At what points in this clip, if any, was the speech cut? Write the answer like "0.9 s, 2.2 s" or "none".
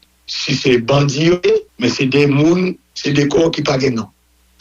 1.4 s